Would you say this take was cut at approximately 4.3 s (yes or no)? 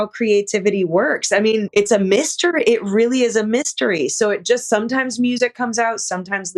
no